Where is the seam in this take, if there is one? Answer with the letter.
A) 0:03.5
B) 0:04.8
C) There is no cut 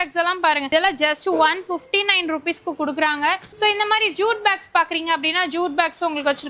A